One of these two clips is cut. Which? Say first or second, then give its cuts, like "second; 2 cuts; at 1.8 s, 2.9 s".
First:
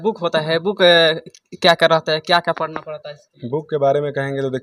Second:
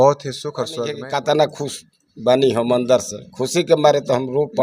second; 1 cut; at 1.0 s